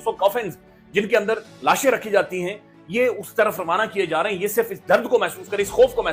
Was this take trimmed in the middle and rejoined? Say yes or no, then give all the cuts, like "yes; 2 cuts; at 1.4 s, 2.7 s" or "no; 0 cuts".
no; 0 cuts